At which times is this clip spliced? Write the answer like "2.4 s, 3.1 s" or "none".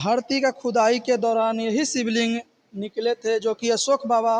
none